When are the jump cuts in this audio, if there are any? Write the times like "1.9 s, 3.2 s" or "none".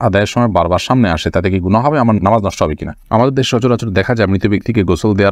2.9 s